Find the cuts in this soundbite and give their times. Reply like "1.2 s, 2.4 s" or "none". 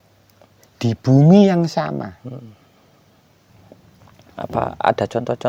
3.5 s